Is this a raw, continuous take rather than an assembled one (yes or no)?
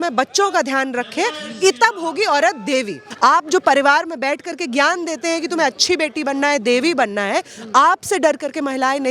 no